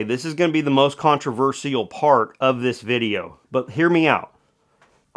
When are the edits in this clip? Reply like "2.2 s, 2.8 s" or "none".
none